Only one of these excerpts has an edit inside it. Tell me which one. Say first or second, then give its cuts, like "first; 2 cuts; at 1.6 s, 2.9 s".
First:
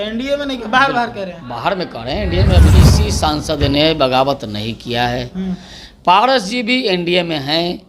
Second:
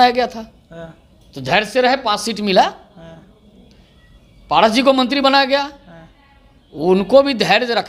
first; 1 cut; at 2.7 s